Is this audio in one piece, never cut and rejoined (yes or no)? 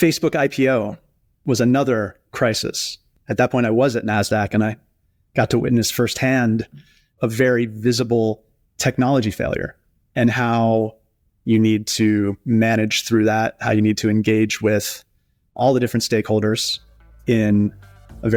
yes